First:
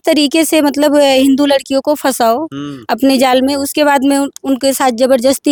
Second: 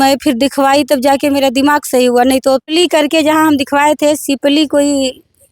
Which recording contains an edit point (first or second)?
second